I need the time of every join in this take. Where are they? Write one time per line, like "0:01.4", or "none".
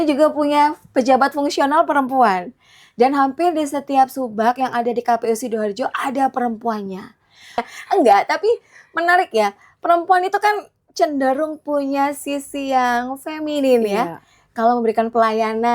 0:07.7